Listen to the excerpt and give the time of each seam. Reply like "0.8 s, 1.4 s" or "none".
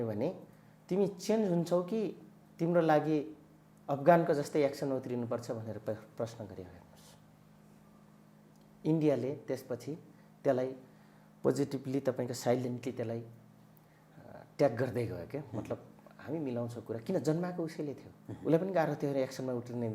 none